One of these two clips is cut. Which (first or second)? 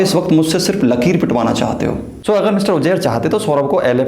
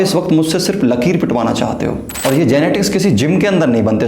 second